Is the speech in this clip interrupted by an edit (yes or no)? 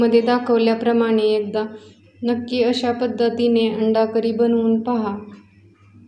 no